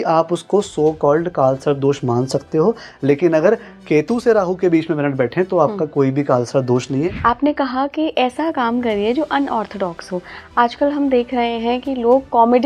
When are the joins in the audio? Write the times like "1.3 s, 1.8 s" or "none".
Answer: 7.1 s